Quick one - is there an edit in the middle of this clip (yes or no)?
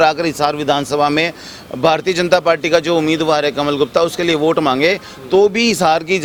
no